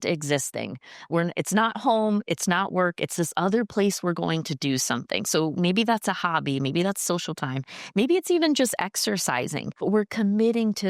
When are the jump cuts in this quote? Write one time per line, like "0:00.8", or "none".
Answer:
0:09.6